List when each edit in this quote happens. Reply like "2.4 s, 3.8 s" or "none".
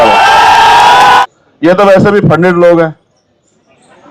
1.2 s